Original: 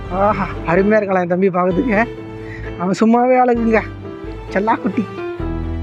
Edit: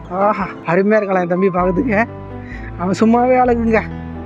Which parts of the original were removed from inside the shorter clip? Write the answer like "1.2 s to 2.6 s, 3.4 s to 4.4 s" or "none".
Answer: none